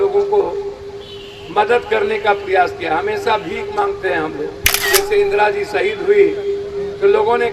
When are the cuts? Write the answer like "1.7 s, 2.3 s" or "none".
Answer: 4.9 s